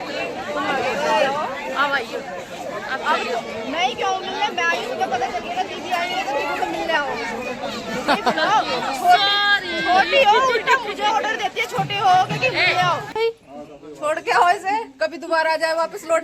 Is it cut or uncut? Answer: cut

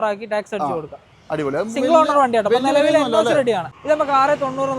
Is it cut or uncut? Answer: cut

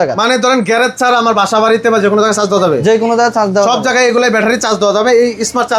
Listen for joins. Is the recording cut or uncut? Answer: uncut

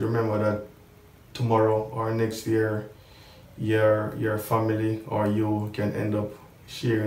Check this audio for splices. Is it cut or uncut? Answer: uncut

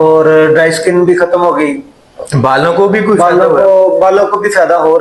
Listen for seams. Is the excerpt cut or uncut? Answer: uncut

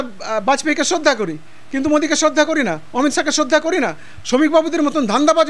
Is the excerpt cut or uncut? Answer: uncut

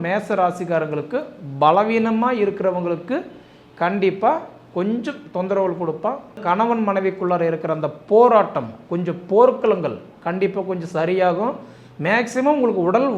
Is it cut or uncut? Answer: cut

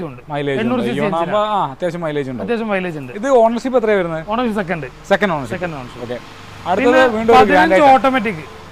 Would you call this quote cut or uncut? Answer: uncut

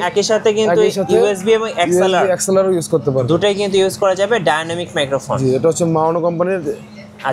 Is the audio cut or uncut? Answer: uncut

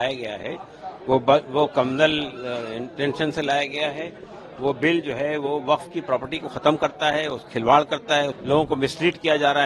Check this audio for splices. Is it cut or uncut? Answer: cut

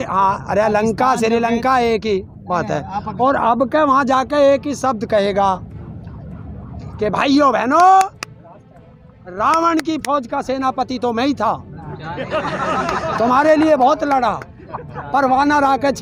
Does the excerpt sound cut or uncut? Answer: uncut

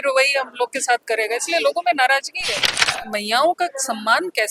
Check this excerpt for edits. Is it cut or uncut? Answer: cut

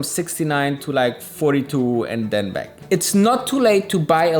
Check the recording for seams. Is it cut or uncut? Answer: cut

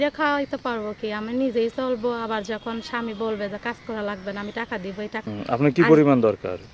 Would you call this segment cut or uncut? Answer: cut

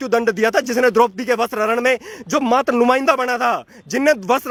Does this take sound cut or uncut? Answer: uncut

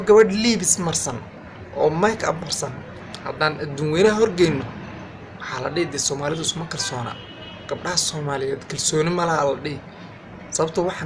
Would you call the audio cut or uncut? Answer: uncut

